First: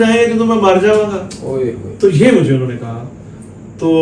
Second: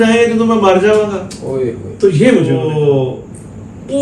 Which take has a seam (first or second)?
second